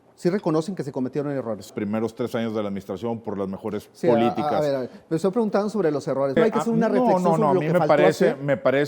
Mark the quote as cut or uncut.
cut